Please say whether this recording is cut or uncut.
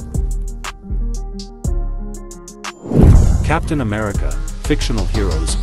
cut